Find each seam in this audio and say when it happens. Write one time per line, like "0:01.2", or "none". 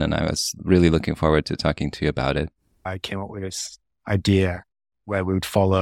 0:02.8